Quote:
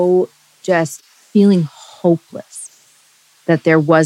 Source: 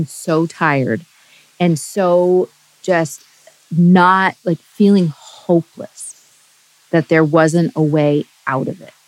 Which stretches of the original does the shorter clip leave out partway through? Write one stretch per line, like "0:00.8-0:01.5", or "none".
0:03.4-0:04.6